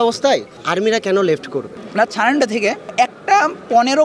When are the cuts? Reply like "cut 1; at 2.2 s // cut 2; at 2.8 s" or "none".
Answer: cut 1; at 1.8 s

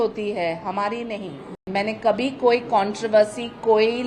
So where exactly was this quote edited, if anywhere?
cut 1; at 1.6 s

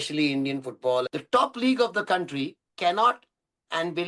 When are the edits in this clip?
cut 1; at 1.1 s // cut 2; at 2.6 s

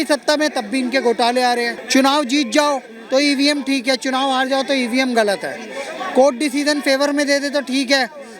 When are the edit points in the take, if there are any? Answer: cut 1; at 1.8 s

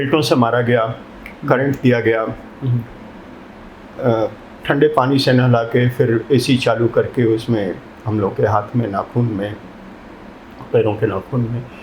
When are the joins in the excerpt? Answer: none

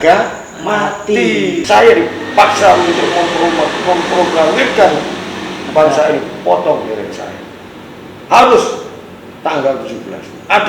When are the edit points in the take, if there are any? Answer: cut 1; at 1.7 s

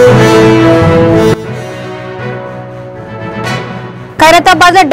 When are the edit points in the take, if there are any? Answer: cut 1; at 1.1 s // cut 2; at 3.4 s

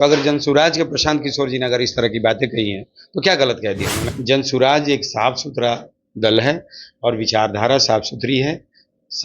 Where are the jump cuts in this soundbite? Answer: cut 1; at 4.1 s

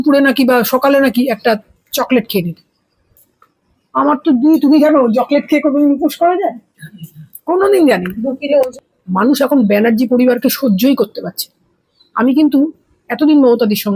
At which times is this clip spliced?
cut 1; at 8.7 s

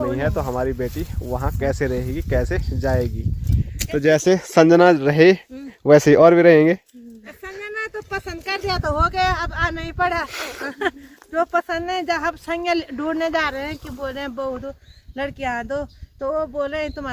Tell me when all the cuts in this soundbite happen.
none

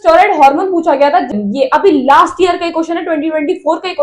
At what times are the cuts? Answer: cut 1; at 1.3 s

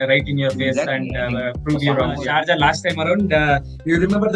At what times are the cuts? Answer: cut 1; at 2.2 s

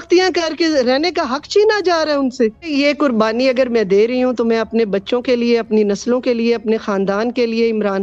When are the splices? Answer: cut 1; at 2.7 s

